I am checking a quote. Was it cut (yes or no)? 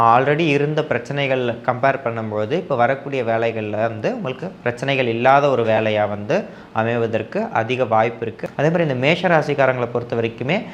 yes